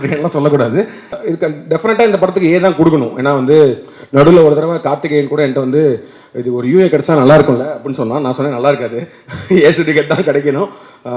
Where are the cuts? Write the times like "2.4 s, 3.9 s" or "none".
1.1 s